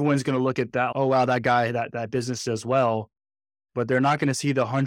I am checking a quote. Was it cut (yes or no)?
no